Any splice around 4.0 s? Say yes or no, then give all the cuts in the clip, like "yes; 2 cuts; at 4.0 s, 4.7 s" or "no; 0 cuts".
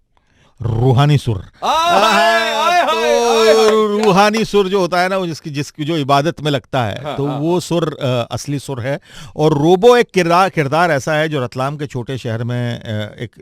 no; 0 cuts